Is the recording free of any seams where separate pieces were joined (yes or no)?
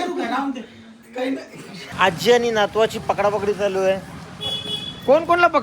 no